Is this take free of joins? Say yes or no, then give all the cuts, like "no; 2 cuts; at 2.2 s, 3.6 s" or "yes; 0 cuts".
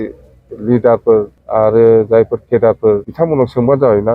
no; 2 cuts; at 1.4 s, 3.1 s